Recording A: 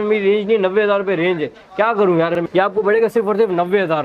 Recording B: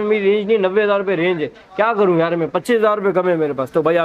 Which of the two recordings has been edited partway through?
A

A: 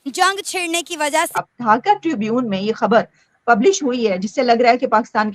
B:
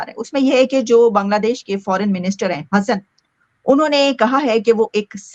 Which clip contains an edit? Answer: A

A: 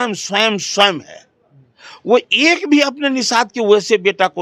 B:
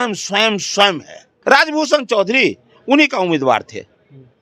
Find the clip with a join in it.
B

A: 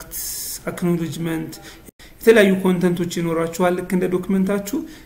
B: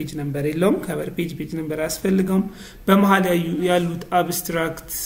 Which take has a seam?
A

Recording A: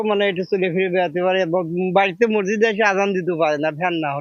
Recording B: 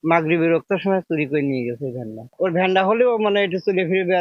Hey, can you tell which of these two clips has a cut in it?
B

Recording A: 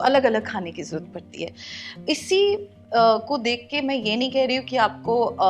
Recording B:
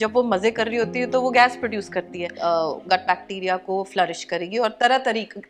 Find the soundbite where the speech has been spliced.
B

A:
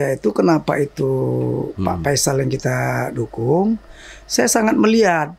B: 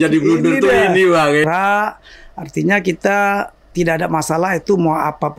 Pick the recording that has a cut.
B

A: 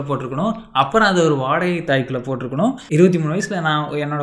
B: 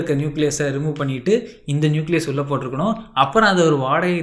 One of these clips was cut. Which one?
A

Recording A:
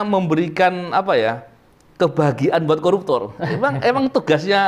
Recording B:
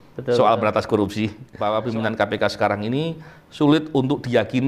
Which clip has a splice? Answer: B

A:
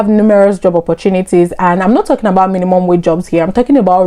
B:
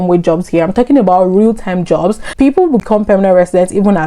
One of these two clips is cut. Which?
B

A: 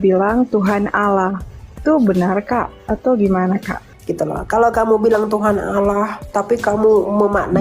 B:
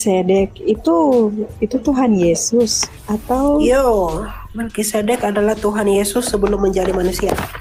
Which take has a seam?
A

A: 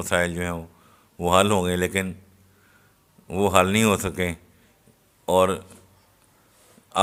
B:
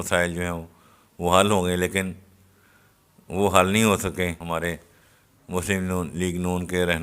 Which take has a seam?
B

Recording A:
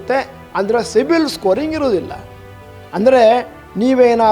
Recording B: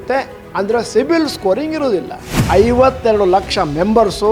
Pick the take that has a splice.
B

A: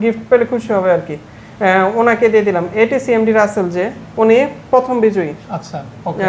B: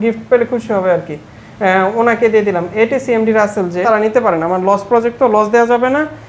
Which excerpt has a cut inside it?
B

